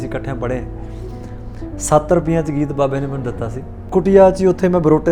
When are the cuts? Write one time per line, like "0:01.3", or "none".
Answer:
0:03.8